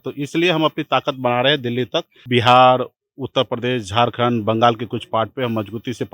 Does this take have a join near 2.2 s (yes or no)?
yes